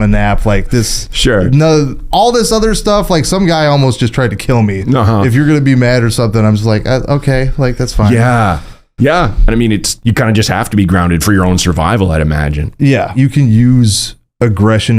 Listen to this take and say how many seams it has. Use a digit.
2